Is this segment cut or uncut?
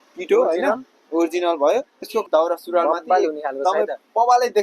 cut